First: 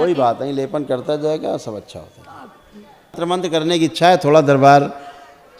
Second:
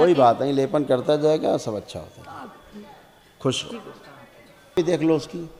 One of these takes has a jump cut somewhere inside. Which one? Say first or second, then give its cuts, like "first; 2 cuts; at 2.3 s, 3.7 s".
first; 1 cut; at 3.2 s